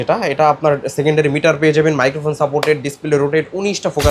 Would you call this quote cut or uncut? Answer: uncut